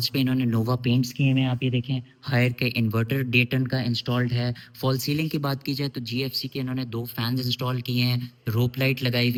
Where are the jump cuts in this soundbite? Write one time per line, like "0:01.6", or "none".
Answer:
none